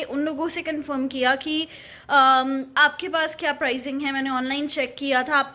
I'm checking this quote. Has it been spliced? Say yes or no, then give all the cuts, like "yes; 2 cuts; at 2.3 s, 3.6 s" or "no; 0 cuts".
no; 0 cuts